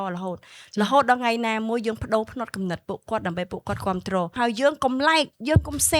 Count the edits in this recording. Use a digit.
1